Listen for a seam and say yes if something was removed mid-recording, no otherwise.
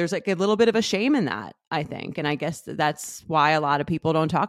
no